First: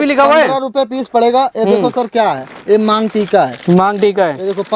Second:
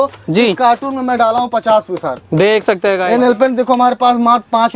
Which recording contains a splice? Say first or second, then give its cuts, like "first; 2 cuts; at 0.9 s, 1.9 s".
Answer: second; 1 cut; at 3.0 s